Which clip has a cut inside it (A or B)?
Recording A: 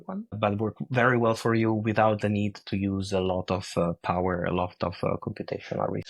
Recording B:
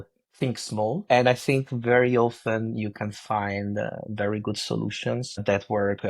B